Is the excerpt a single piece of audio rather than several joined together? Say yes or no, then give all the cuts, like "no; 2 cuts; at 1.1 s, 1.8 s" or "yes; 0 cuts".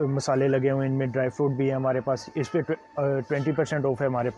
yes; 0 cuts